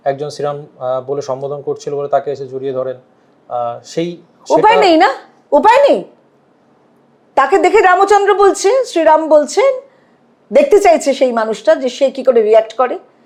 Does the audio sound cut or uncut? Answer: uncut